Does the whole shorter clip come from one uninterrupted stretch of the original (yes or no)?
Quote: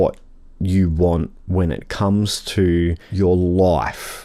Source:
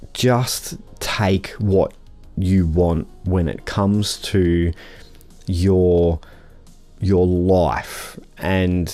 no